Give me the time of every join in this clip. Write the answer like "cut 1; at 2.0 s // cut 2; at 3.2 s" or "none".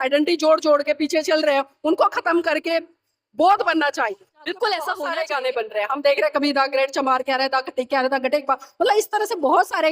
cut 1; at 5.0 s